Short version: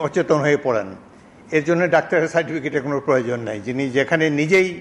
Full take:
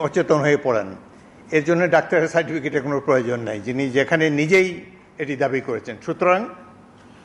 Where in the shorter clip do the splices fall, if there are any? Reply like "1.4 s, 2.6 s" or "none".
none